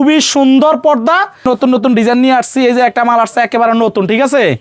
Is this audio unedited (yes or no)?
no